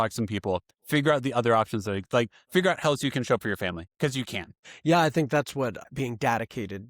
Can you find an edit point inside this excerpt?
yes; 2 cuts; at 4.6 s, 5.9 s

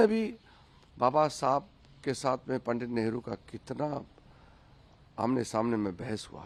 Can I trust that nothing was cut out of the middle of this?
yes; 0 cuts

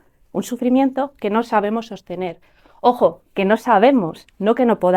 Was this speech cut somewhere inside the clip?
no; 0 cuts

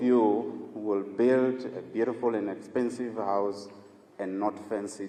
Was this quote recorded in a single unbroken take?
yes; 0 cuts

